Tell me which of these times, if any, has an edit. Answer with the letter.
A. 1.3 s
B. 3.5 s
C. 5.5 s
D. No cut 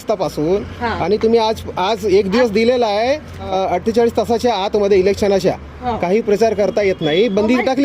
B